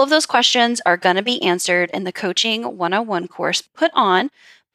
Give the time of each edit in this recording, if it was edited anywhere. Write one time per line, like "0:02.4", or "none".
0:03.7